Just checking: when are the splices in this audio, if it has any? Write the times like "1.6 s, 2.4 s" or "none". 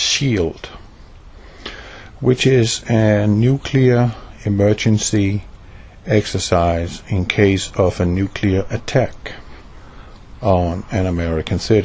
2.2 s